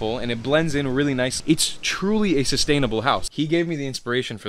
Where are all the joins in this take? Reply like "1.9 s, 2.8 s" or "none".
1.4 s, 3.3 s